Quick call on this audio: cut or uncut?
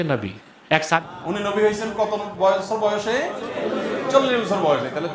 cut